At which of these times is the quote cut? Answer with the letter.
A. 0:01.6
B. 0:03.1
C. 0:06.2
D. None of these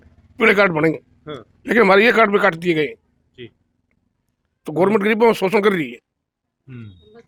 D